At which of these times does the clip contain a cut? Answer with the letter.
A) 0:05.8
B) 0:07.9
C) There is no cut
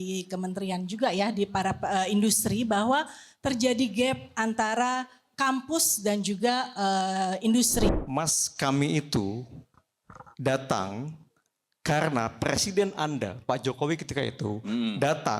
B